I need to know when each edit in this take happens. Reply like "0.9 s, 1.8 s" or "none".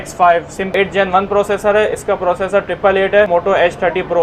0.7 s, 3.3 s

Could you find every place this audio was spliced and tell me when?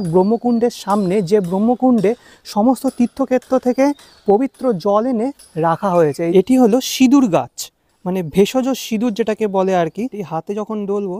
6.3 s, 10.2 s

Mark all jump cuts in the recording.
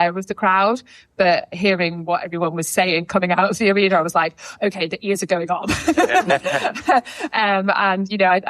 1.5 s

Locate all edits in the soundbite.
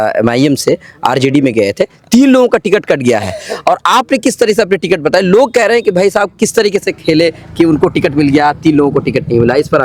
none

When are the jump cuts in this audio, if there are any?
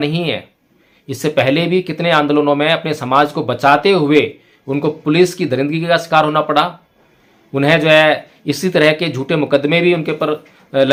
none

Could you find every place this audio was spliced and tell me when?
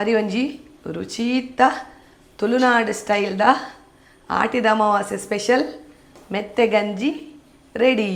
none

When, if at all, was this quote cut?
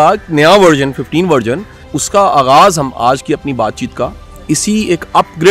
1.9 s

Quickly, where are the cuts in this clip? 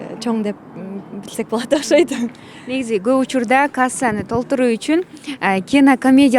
none

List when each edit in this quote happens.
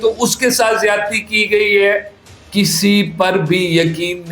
2.4 s

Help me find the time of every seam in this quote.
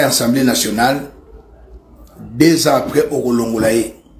none

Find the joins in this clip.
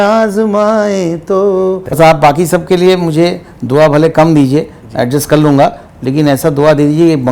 1.8 s

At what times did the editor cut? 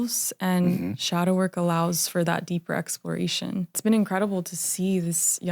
3.8 s

